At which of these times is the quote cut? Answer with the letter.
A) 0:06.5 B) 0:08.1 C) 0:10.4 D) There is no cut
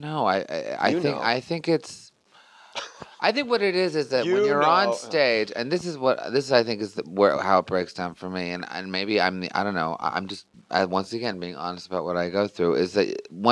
D